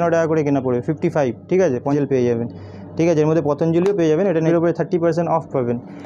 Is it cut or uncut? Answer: cut